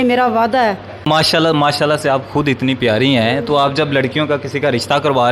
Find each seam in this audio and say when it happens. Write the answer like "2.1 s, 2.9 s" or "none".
1.0 s